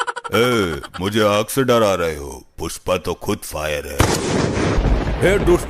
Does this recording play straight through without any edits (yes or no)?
no